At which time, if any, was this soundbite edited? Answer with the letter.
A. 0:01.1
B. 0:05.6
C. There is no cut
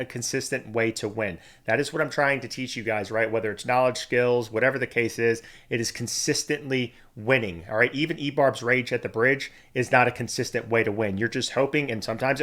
C